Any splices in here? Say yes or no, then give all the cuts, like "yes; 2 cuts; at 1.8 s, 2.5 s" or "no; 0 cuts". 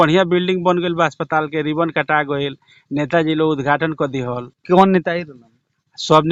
no; 0 cuts